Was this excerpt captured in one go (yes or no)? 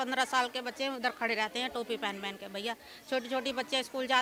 yes